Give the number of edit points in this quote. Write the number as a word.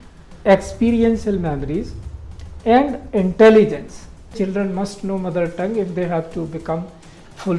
one